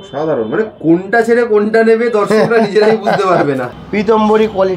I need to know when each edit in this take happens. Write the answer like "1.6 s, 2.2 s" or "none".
3.7 s